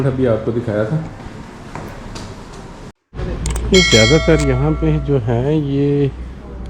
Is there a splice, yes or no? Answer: yes